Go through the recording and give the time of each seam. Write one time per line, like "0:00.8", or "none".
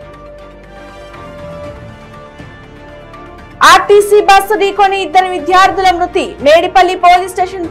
none

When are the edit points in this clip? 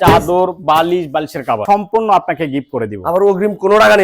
0:01.6

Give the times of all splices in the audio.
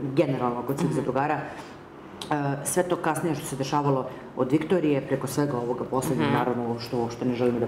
none

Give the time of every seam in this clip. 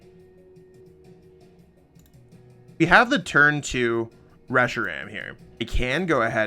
0:00.8
0:02.7
0:05.6

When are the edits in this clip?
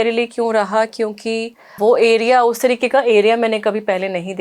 0:01.8

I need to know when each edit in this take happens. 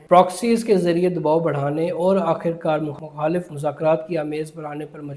0:03.5

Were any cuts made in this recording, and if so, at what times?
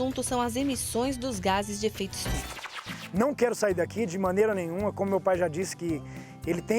0:02.7

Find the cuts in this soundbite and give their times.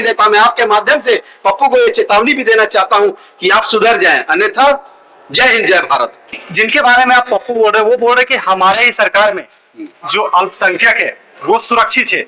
none

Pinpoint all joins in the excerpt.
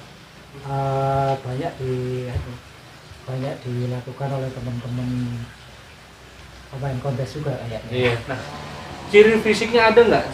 0:08.3

